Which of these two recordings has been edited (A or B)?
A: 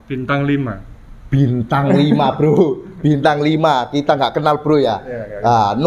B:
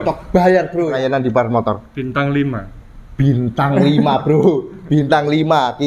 B